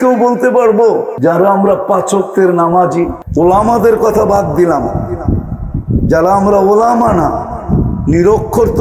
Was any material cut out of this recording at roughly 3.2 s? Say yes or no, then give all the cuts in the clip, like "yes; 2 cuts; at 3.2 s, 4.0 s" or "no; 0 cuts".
yes; 2 cuts; at 1.1 s, 3.2 s